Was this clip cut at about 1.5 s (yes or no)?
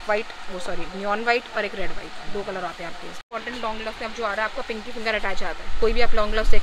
no